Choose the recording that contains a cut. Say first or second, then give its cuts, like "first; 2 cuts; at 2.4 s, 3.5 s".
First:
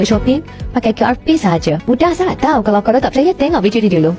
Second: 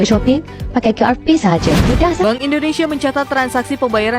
second; 1 cut; at 2.2 s